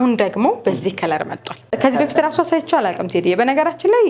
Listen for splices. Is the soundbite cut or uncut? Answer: cut